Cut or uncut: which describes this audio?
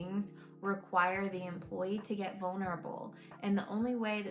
uncut